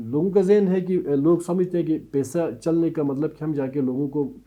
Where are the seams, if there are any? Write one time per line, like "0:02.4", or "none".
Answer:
none